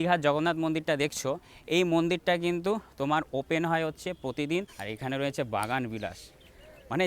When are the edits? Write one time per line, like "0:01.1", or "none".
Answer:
0:04.8